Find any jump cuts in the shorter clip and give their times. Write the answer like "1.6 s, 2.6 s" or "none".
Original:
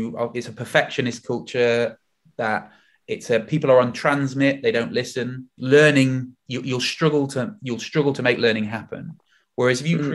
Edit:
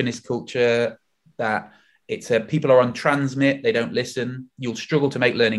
4.5 s